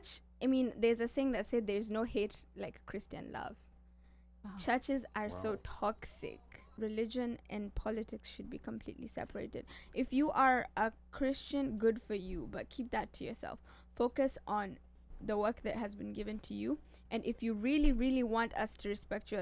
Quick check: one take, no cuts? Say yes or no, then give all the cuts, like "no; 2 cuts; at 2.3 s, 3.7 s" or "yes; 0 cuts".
no; 1 cut; at 6.7 s